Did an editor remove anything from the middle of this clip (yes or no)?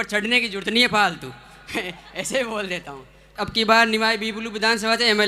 yes